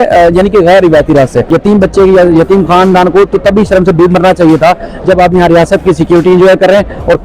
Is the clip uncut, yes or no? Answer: no